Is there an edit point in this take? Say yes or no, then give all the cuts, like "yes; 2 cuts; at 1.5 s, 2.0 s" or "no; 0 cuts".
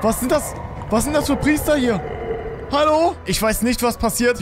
yes; 1 cut; at 3.3 s